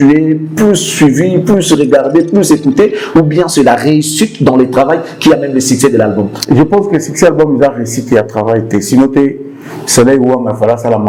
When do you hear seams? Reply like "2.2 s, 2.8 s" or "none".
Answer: none